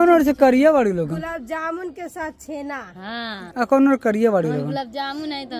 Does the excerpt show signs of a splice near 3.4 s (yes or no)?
no